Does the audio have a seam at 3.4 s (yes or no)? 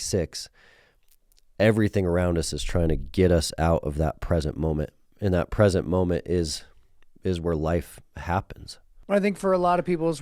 no